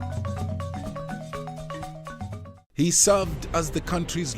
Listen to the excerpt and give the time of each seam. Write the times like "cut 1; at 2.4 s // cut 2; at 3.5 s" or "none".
cut 1; at 2.6 s

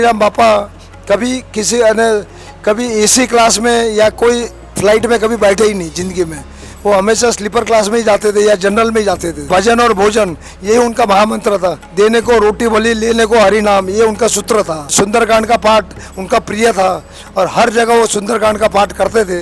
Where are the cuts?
cut 1; at 9.5 s // cut 2; at 11.8 s // cut 3; at 14.9 s

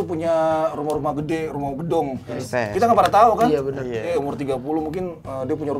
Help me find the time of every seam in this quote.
cut 1; at 2.3 s // cut 2; at 4.0 s

